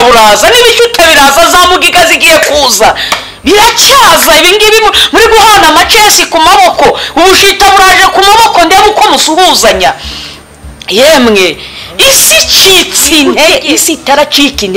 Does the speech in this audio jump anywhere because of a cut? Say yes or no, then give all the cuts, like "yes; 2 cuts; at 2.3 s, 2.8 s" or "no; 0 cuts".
yes; 1 cut; at 13.5 s